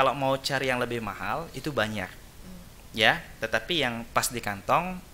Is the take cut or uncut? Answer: uncut